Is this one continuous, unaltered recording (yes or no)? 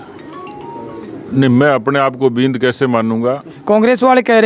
no